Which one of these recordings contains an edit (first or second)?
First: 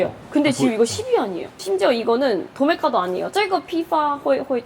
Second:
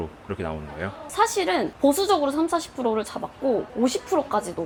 first